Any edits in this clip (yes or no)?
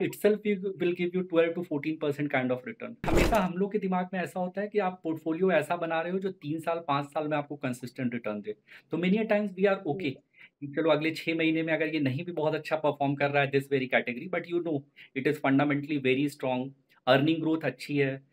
yes